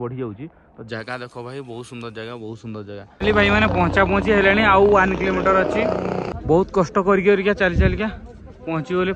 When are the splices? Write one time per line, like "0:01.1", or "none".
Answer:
0:03.1

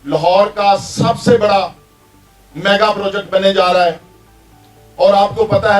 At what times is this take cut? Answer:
none

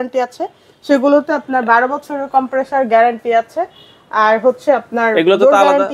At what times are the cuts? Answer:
none

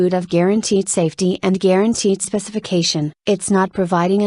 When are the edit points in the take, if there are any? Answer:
0:03.0

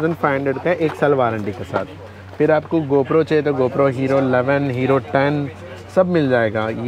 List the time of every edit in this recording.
none

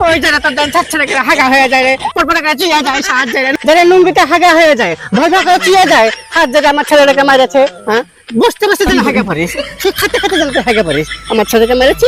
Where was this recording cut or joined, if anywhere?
none

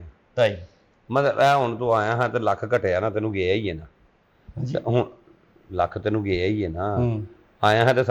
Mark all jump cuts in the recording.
none

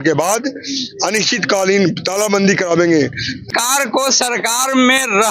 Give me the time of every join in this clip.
0:03.5

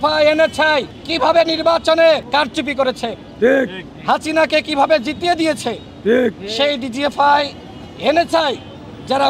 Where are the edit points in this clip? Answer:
0:01.0
0:02.2

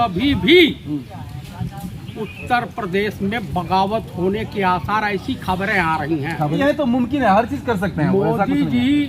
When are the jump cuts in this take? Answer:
0:06.5

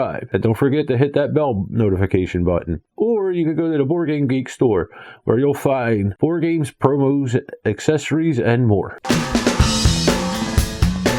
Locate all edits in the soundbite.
0:08.9

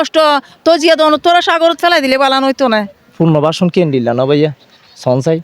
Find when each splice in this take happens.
0:03.1

